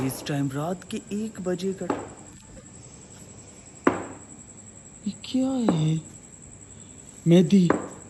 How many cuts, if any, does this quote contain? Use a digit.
0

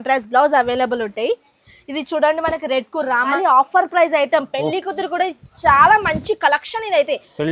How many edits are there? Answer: 1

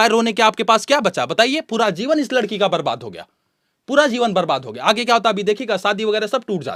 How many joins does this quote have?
0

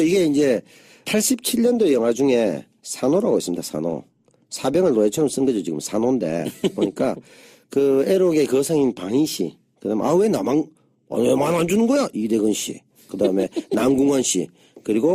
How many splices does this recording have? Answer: 1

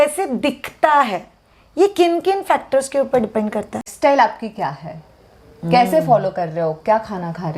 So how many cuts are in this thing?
1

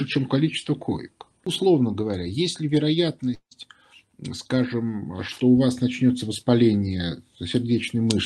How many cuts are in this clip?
1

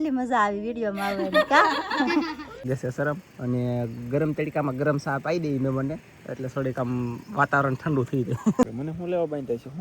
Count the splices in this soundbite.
2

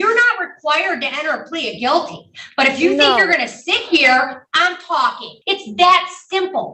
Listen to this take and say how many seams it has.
1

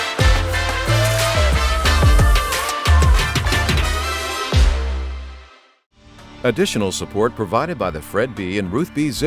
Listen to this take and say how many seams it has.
1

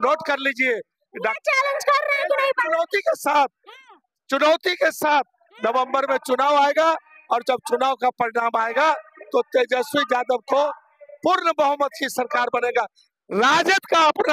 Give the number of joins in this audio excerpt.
0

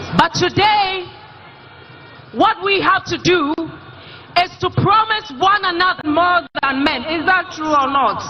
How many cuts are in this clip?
1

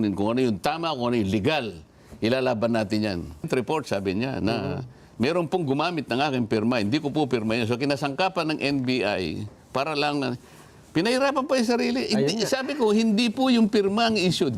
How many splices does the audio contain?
1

